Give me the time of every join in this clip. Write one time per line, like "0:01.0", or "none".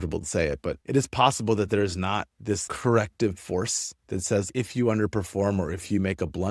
0:04.5